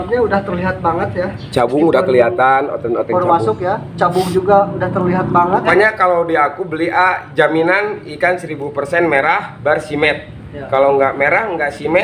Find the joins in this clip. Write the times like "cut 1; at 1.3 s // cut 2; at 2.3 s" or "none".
cut 1; at 5.7 s